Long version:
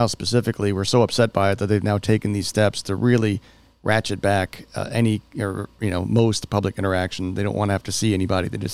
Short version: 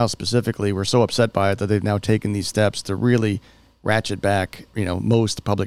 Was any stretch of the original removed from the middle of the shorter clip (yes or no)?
yes